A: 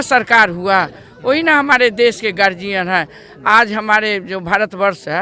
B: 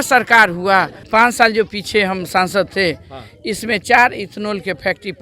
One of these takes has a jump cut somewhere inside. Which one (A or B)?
B